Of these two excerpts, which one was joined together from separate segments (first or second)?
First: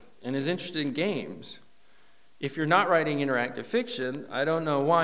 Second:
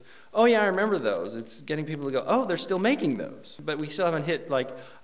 second